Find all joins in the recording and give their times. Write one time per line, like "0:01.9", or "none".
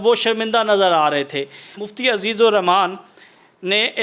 0:01.8